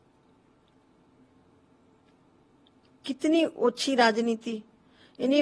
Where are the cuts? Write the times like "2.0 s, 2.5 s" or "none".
none